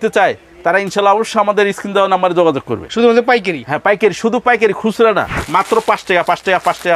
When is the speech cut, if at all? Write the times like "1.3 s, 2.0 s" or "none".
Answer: 5.4 s